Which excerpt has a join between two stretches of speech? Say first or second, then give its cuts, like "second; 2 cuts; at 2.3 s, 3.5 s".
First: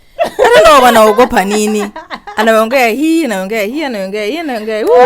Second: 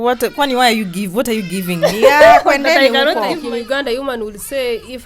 second; 1 cut; at 3.4 s